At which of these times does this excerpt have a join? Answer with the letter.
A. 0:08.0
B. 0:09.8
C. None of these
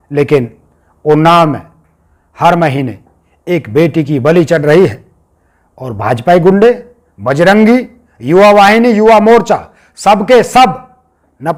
C